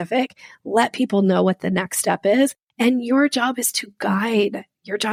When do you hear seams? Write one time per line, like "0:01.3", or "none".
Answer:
none